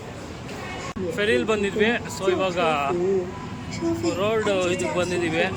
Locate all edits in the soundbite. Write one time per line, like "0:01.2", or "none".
none